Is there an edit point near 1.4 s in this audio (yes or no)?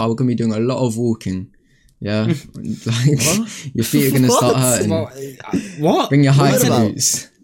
no